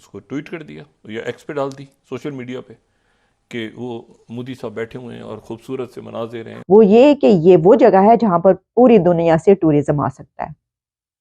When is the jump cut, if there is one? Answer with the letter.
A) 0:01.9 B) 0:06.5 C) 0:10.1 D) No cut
B